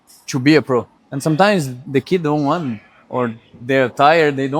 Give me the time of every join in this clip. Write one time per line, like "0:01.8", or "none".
0:01.0
0:01.8